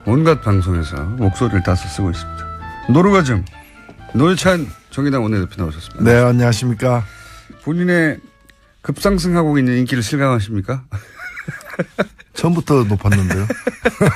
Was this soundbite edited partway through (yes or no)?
no